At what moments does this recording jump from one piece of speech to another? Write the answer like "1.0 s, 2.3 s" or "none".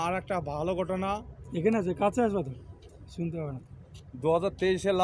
none